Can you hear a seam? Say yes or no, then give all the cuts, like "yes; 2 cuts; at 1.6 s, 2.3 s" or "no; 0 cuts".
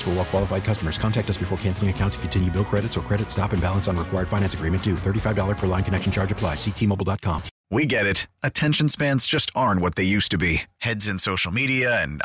yes; 1 cut; at 7.5 s